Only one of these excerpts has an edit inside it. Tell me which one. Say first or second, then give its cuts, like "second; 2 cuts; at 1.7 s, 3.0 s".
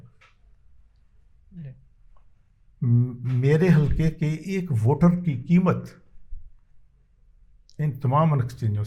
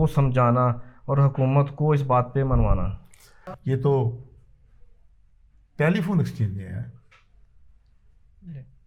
second; 1 cut; at 3.4 s